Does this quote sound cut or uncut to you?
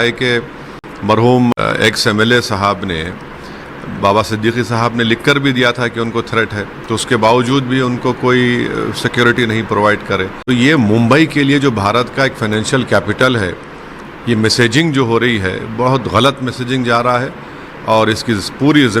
cut